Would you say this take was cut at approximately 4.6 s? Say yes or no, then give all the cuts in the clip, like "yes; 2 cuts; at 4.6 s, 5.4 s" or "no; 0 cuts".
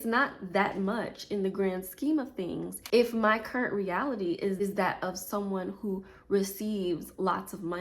yes; 2 cuts; at 2.7 s, 4.6 s